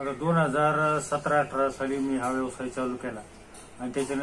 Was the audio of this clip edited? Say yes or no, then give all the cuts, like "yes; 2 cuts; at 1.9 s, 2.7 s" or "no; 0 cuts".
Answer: no; 0 cuts